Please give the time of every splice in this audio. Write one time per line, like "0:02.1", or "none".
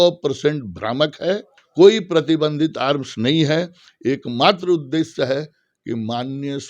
0:01.6